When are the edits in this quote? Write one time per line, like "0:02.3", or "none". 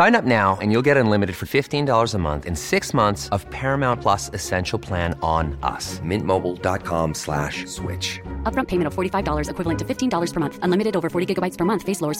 none

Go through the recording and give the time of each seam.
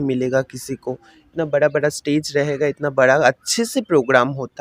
none

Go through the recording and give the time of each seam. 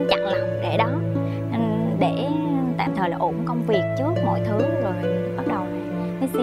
none

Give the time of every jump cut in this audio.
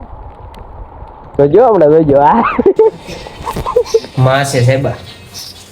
0:04.1

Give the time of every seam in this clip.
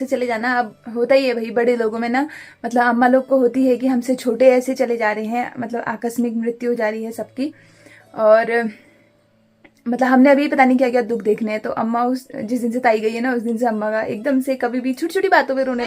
none

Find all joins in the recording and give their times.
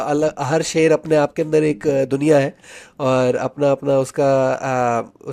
none

